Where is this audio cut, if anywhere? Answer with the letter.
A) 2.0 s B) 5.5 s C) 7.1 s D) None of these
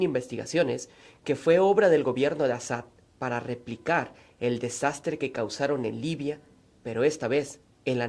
D